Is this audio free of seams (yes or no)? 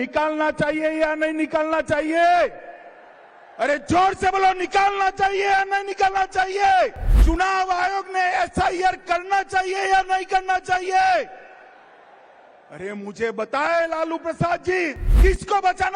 no